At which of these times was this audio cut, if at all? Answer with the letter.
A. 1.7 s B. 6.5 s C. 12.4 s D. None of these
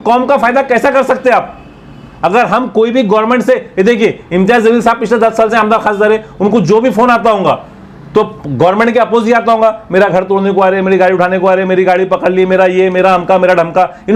D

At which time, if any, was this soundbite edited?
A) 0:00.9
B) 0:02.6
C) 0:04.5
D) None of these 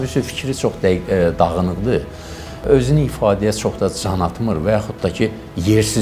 B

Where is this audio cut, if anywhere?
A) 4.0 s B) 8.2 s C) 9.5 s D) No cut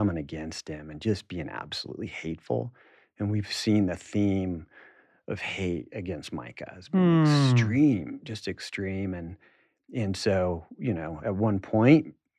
D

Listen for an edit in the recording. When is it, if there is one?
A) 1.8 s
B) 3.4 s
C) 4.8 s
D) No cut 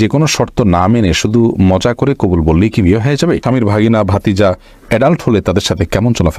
B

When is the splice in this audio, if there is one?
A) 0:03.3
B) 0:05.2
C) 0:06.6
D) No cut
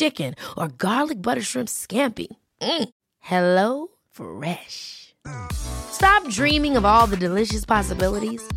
D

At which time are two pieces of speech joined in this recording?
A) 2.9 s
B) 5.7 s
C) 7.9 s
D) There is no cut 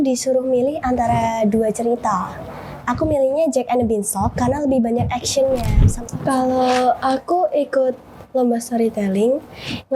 B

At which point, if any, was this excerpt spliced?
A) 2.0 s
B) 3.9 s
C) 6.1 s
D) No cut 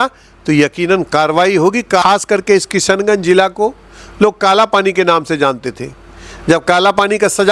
A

